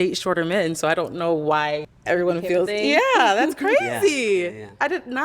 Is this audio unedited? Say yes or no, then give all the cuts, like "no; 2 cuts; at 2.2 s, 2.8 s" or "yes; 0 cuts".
no; 2 cuts; at 1.9 s, 3.0 s